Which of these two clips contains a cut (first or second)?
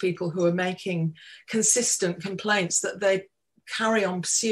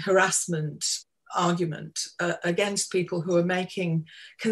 second